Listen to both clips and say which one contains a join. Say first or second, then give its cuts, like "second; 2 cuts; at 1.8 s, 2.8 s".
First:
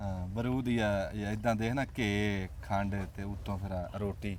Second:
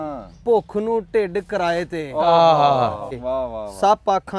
second; 1 cut; at 3.1 s